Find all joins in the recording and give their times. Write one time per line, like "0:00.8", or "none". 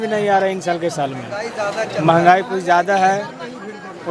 none

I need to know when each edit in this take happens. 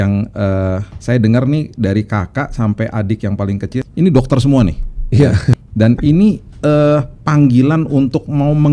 0:00.9
0:03.8
0:05.6

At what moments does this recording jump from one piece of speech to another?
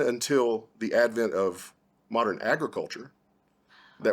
0:02.4

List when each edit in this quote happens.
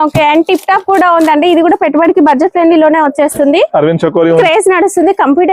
0:04.4

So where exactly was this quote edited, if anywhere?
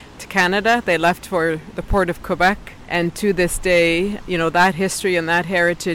0:02.8

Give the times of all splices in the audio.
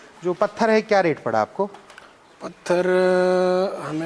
none

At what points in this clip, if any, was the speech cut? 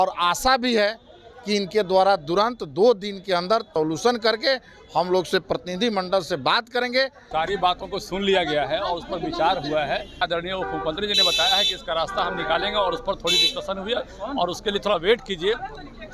0:03.7
0:07.2
0:10.2

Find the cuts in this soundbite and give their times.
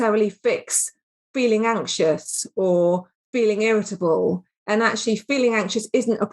0:04.5

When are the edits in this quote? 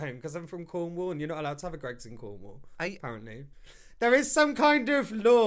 none

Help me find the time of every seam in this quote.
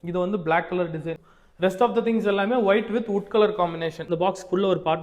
0:01.2
0:04.0

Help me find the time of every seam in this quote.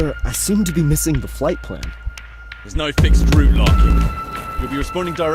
none

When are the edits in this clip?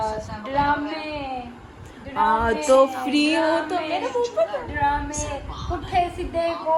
none

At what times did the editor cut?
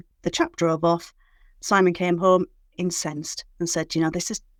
none

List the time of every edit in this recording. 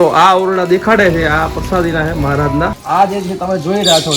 0:02.8

